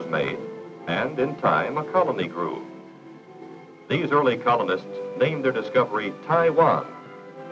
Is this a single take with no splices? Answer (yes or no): no